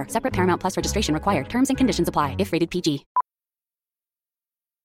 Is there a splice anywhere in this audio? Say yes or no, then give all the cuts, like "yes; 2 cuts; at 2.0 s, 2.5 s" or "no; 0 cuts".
yes; 1 cut; at 3.1 s